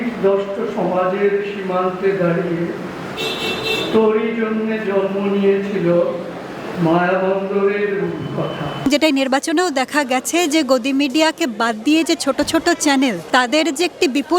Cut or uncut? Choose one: cut